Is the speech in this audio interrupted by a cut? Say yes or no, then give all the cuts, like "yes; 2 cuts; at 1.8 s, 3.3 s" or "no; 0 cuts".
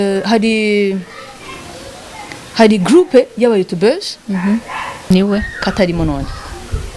yes; 1 cut; at 5.1 s